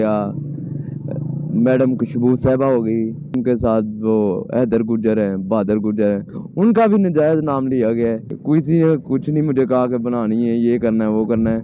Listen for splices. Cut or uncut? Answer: cut